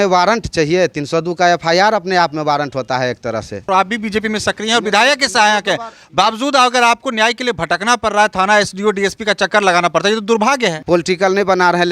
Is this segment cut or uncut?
cut